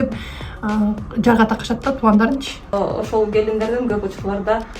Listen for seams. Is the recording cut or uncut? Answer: cut